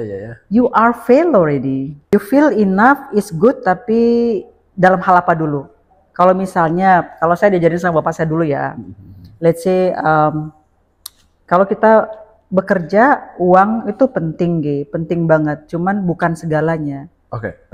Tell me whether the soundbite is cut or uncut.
cut